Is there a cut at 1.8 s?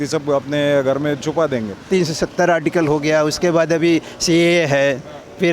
yes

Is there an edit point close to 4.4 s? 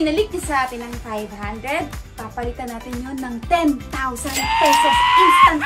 yes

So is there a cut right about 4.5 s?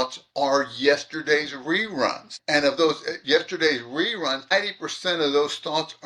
yes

